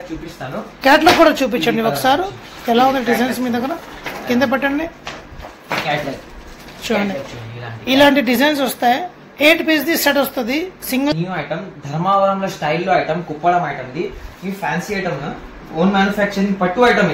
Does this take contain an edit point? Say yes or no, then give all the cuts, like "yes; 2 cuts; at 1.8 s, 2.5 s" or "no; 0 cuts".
yes; 1 cut; at 11.1 s